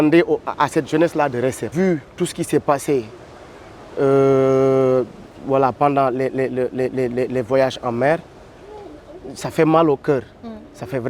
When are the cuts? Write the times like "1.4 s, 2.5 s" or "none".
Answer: none